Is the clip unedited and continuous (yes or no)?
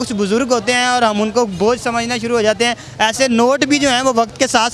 yes